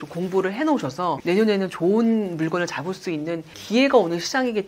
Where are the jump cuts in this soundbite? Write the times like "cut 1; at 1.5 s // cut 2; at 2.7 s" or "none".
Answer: cut 1; at 1.2 s // cut 2; at 3.5 s

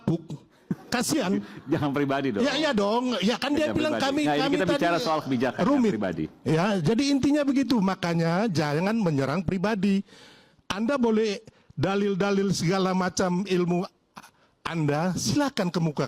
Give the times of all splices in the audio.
none

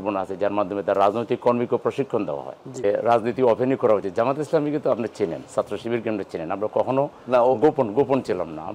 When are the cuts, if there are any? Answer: cut 1; at 2.8 s

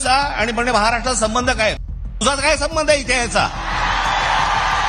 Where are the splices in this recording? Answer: none

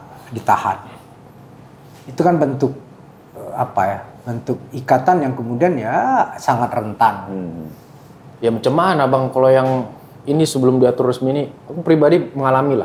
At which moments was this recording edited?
none

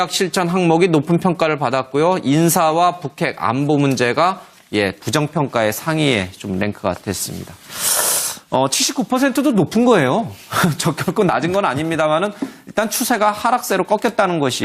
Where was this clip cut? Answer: cut 1; at 1.4 s

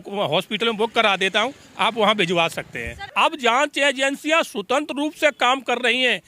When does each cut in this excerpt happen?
cut 1; at 3.0 s

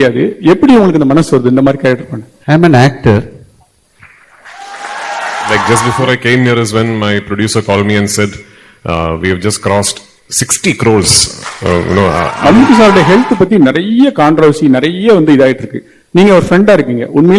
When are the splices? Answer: cut 1; at 5.6 s // cut 2; at 12.3 s

